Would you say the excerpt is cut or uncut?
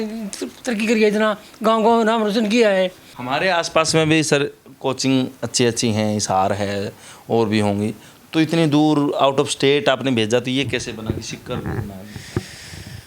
cut